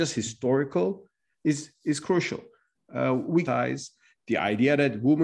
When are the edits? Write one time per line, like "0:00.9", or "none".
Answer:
0:03.4